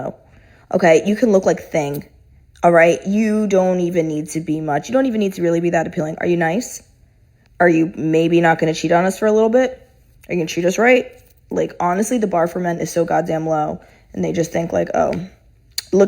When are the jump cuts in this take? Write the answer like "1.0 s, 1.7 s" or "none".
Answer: 1.0 s